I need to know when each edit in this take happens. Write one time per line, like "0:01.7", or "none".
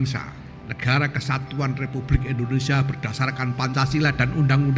none